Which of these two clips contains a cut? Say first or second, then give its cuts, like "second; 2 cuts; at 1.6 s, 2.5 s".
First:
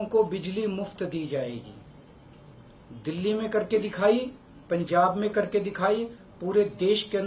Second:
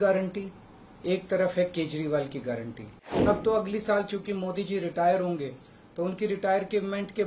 second; 1 cut; at 3.3 s